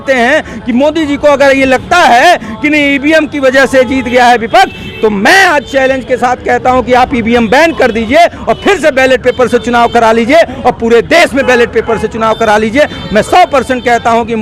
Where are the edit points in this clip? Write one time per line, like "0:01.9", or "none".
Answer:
none